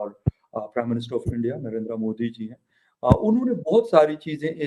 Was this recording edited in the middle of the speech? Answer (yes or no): no